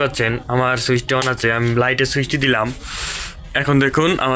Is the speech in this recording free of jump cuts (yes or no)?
yes